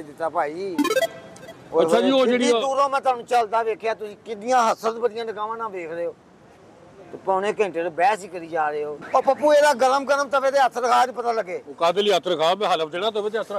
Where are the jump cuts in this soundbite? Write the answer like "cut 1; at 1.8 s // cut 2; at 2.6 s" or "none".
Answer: cut 1; at 8.9 s